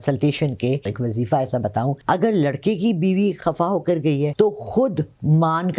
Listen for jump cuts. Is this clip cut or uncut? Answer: cut